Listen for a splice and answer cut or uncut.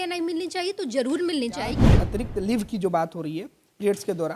cut